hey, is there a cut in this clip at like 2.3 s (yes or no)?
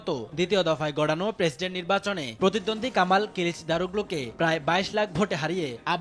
no